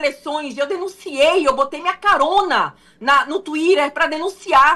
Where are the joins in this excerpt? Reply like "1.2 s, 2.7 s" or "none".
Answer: none